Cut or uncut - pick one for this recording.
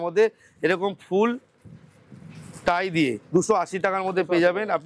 uncut